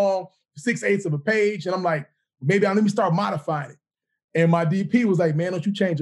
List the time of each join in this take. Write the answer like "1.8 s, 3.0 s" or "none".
none